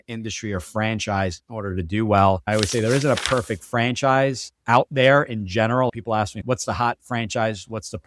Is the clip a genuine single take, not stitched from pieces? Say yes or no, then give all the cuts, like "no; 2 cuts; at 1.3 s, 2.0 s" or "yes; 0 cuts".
no; 1 cut; at 2.4 s